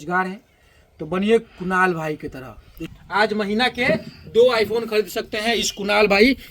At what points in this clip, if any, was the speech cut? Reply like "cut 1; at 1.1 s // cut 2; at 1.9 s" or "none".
cut 1; at 2.8 s